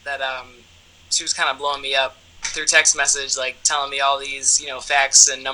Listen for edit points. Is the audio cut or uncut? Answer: uncut